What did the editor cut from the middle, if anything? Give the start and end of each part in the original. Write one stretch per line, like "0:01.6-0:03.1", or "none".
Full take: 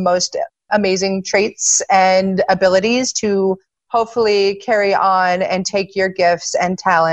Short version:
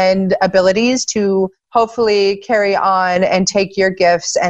0:03.7-0:03.8